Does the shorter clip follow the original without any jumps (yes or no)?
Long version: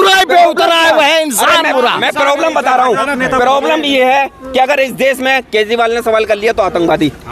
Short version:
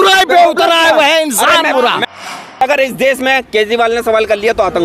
no